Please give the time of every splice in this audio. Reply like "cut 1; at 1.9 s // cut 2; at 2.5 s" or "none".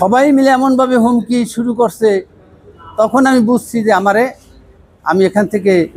none